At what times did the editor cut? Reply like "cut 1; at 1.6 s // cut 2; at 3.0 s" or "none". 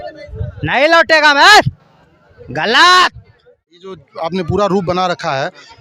cut 1; at 4.0 s